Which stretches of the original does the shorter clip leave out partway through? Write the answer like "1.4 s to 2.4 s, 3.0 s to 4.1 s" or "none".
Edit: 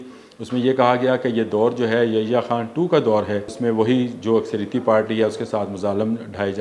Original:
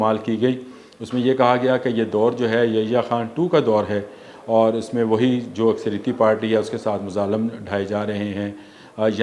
4.1 s to 4.9 s